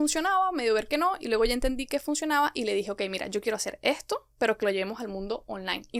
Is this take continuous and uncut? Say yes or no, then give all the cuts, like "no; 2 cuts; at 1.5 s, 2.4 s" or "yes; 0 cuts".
yes; 0 cuts